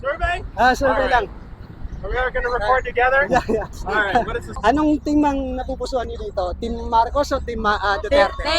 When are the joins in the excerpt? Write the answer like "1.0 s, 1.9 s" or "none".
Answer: 4.4 s